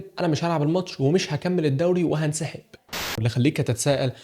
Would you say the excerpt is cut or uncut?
cut